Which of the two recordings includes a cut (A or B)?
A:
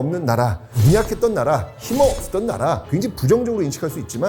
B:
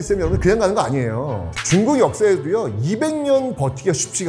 A